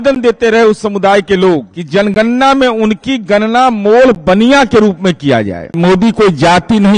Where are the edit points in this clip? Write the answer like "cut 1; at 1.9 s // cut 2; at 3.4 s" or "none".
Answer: cut 1; at 1.8 s // cut 2; at 5.7 s